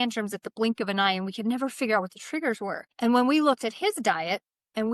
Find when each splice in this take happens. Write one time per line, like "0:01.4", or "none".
0:02.8